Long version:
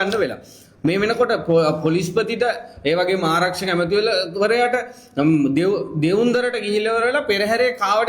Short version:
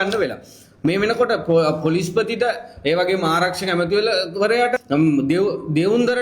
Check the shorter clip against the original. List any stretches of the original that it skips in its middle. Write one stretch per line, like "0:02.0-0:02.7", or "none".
0:04.8-0:05.1